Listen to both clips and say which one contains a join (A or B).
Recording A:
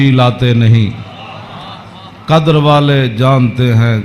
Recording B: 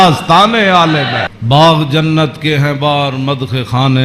B